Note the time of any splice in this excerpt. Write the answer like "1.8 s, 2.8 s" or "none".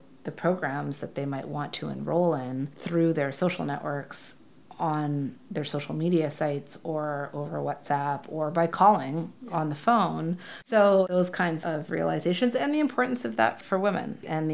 10.5 s